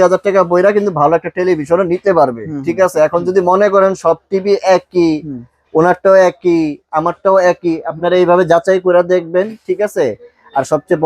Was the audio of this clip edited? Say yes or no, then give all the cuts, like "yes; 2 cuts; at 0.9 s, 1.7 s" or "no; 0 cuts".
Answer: no; 0 cuts